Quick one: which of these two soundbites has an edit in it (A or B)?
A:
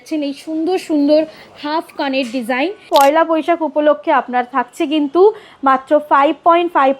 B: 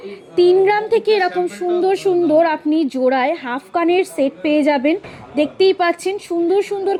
A